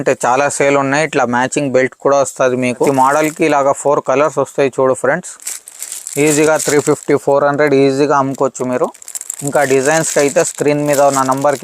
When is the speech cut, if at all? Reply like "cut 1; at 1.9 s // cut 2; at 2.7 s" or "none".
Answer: cut 1; at 2.9 s